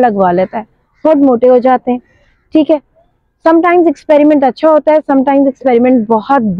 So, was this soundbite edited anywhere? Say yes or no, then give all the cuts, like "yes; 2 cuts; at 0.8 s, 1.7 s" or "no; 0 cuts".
no; 0 cuts